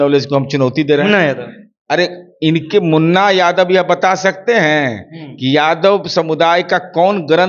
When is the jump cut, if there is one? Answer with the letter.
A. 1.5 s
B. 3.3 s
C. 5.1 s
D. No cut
D